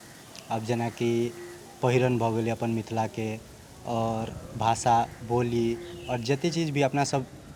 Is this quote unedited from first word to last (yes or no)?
yes